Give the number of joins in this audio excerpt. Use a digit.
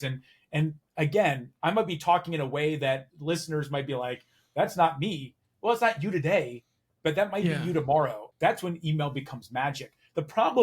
1